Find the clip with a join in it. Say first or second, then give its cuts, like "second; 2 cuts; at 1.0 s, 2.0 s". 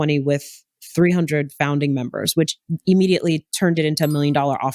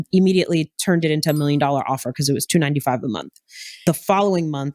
second; 1 cut; at 3.8 s